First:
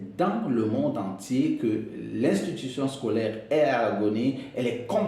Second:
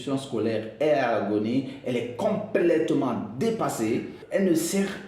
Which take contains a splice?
second; 1 cut; at 4.2 s

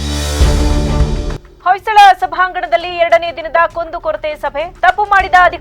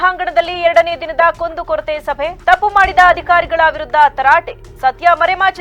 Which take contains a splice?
first; 1 cut; at 1.4 s

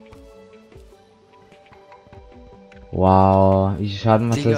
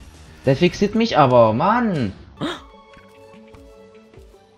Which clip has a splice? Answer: second; 1 cut; at 2.2 s

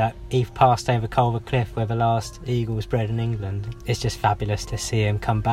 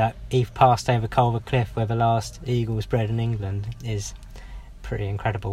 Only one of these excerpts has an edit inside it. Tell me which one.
first; 2 cuts; at 3.7 s, 4.7 s

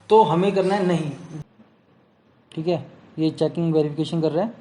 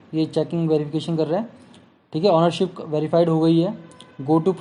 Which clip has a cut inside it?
first; 1 cut; at 1.3 s

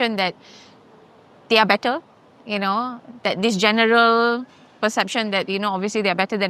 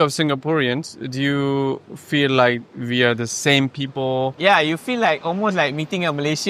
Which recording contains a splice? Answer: second; 1 cut; at 4.4 s

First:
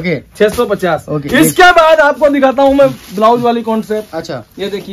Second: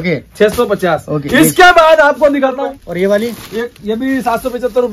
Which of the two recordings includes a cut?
second; 1 cut; at 2.5 s

